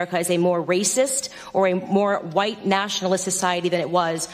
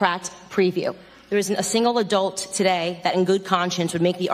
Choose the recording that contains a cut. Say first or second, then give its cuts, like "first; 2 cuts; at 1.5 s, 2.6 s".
second; 1 cut; at 1.1 s